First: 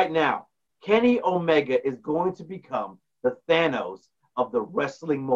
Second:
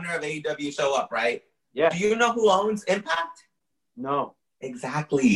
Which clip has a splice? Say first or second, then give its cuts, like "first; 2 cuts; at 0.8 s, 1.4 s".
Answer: second; 1 cut; at 4.4 s